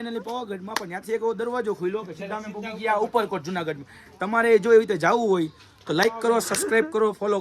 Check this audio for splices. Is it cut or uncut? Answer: uncut